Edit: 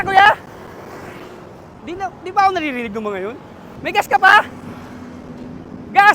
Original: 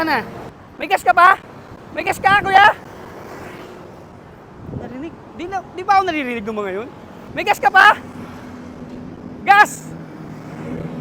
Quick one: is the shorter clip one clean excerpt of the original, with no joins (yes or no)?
no